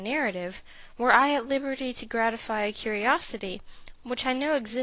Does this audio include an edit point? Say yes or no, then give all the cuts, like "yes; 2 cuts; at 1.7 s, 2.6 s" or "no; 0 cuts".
no; 0 cuts